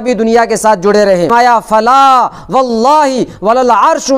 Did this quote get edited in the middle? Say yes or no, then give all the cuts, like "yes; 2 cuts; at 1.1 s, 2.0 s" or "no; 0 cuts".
yes; 1 cut; at 1.3 s